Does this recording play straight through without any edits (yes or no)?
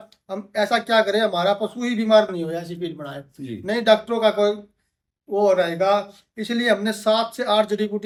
yes